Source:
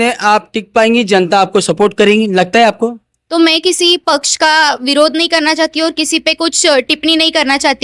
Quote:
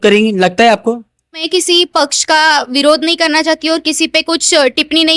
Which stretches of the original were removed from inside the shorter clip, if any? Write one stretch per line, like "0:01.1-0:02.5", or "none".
0:03.3-0:03.5